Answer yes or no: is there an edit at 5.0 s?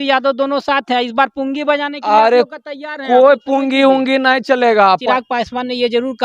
yes